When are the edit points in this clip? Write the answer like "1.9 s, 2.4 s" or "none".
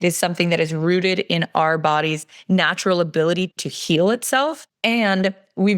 4.7 s